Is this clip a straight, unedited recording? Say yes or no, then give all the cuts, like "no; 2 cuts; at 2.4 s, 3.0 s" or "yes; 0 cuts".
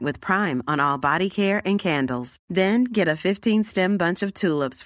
yes; 0 cuts